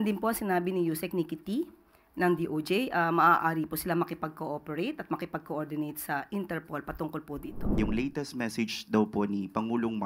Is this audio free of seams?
no; 1 cut; at 7.7 s

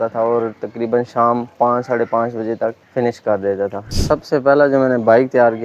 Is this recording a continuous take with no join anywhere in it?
no; 2 cuts; at 2.8 s, 3.9 s

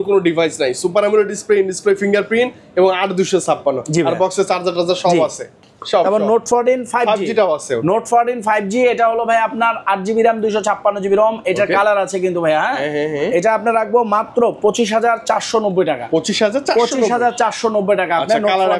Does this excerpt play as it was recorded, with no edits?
yes; 0 cuts

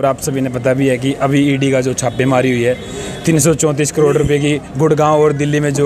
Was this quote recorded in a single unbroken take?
yes; 0 cuts

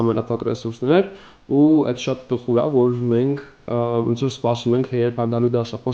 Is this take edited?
no; 0 cuts

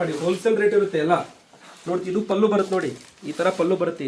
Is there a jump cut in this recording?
no; 0 cuts

